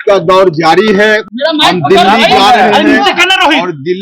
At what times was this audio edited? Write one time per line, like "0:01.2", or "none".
0:01.3